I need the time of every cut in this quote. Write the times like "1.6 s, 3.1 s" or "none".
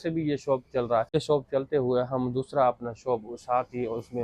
1.2 s